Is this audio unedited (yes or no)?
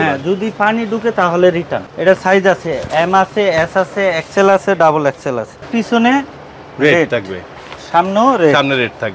no